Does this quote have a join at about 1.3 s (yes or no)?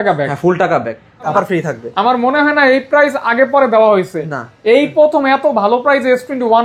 yes